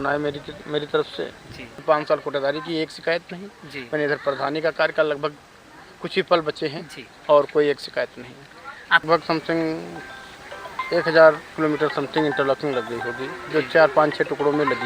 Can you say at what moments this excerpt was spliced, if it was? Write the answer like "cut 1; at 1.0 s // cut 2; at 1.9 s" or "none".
cut 1; at 1.8 s // cut 2; at 9.0 s